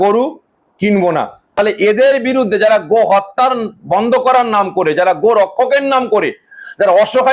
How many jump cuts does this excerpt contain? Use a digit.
1